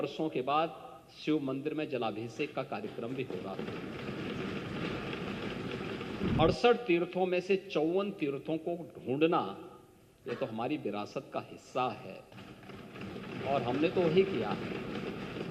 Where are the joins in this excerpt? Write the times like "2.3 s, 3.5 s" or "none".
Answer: 6.3 s